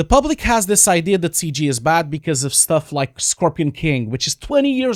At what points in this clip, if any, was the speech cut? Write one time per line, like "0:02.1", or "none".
none